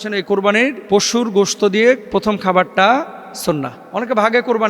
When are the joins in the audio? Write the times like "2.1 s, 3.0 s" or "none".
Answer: 0.8 s, 3.8 s